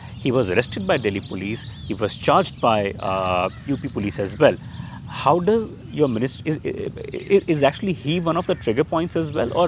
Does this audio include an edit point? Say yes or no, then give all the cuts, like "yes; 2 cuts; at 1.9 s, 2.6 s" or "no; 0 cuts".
no; 0 cuts